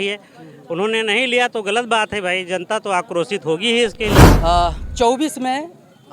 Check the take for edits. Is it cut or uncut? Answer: cut